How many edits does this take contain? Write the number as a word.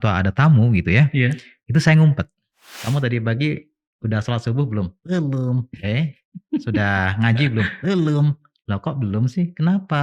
one